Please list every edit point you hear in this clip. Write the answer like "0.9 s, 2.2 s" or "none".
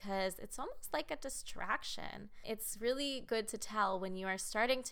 2.4 s